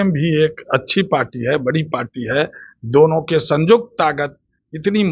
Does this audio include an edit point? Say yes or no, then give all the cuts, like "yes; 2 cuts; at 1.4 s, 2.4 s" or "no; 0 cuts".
no; 0 cuts